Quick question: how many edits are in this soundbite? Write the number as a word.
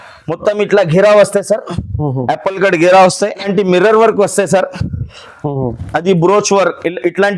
one